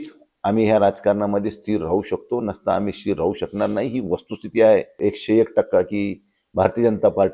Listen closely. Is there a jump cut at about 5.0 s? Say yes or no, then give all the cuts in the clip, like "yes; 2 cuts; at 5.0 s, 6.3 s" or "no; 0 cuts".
yes; 1 cut; at 5.0 s